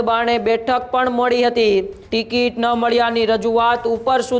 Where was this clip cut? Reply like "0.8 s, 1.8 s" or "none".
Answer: 2.0 s

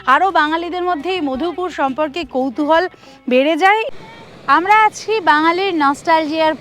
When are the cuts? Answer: 3.9 s

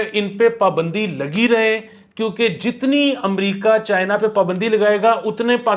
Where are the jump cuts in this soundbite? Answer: none

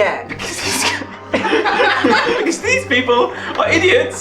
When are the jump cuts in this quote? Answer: 2.3 s

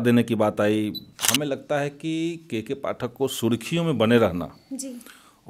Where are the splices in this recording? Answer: 1.1 s

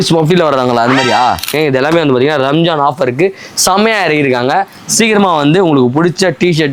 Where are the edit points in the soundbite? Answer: 1.6 s

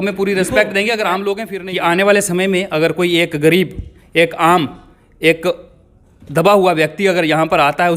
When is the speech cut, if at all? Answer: 1.5 s

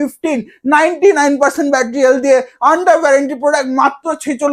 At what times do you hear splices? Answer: none

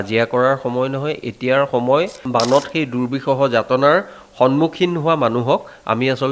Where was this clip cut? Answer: 2.2 s

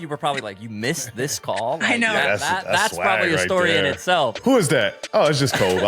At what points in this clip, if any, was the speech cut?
4.4 s

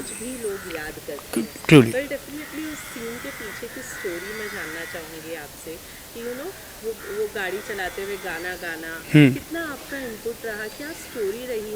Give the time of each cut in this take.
none

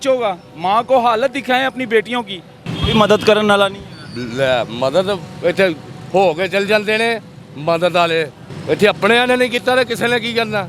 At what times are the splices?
2.7 s, 8.5 s

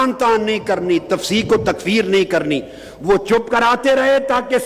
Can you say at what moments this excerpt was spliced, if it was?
none

